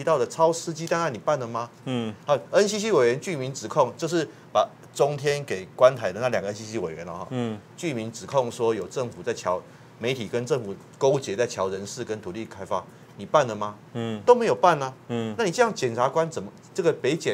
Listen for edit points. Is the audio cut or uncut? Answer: uncut